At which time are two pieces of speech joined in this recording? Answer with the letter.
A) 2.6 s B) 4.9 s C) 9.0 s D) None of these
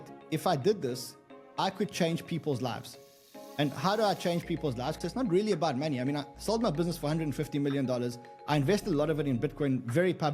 B